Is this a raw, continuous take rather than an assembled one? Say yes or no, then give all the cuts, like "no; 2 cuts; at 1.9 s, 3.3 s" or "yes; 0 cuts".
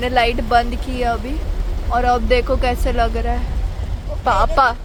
yes; 0 cuts